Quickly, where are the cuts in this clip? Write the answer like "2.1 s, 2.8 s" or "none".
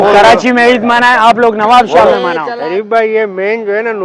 2.4 s

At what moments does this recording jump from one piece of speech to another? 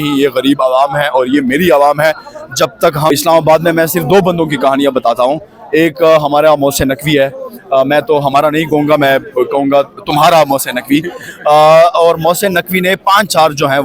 3.1 s

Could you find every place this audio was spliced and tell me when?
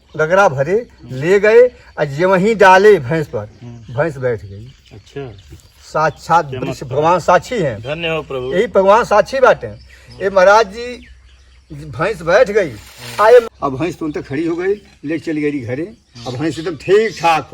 13.5 s

